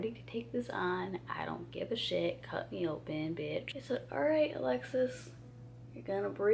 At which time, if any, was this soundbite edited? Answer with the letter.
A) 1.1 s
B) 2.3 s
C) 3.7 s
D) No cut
C